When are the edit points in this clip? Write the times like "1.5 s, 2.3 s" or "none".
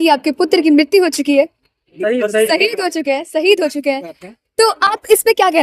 none